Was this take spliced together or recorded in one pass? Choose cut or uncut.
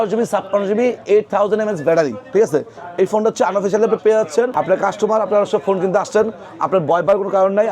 cut